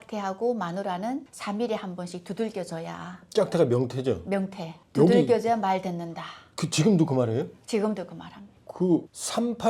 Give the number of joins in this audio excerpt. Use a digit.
0